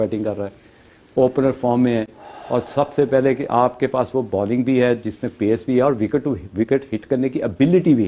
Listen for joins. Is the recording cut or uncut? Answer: uncut